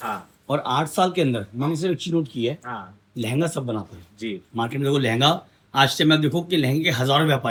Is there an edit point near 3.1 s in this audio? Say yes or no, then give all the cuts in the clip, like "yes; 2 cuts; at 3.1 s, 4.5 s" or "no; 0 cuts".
no; 0 cuts